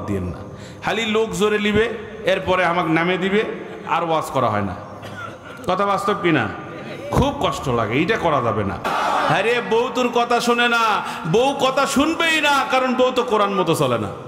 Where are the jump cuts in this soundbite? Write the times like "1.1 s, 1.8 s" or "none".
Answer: 8.9 s